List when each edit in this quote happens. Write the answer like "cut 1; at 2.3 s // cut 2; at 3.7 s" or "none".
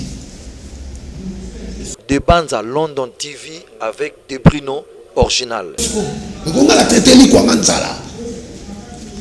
cut 1; at 1.9 s // cut 2; at 5.9 s